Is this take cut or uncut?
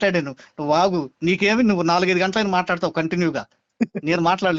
uncut